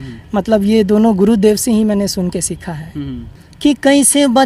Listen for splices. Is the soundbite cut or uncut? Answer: cut